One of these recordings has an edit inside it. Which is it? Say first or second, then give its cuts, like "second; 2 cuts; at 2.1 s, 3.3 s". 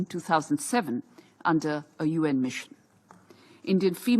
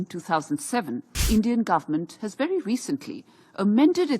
second; 1 cut; at 1.1 s